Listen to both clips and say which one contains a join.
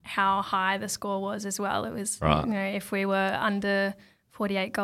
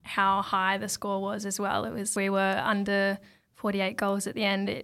second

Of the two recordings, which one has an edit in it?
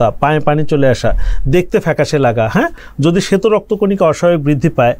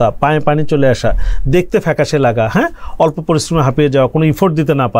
first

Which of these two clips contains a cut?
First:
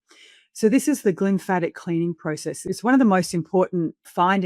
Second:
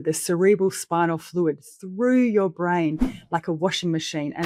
first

